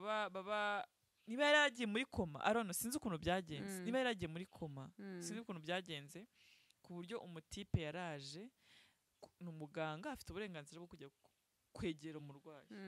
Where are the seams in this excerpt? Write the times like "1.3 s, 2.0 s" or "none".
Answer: none